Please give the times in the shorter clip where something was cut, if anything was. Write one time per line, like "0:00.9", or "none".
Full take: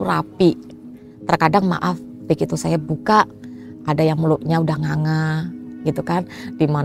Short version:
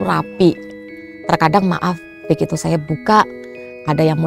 none